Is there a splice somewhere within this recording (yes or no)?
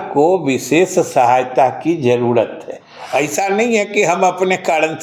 no